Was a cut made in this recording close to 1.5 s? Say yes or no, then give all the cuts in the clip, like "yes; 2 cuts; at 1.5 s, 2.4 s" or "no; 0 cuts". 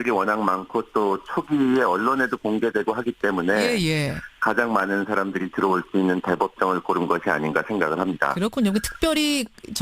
yes; 1 cut; at 1.5 s